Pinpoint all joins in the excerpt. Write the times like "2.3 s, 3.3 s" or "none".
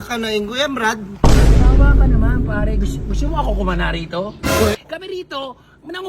4.8 s